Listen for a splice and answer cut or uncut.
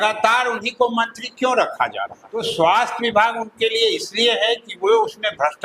cut